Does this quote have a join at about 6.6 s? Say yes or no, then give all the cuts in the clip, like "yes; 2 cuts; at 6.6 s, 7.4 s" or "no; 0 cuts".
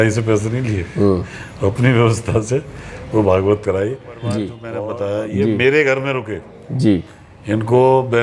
no; 1 cut; at 4.6 s